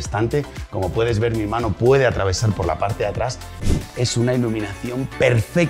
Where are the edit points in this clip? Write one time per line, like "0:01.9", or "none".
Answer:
0:03.5